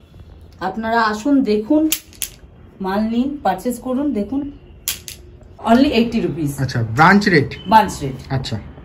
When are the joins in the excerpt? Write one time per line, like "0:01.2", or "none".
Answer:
0:05.6